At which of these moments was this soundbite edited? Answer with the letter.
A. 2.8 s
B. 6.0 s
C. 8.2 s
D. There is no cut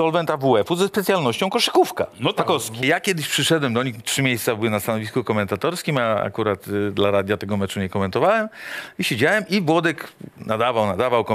A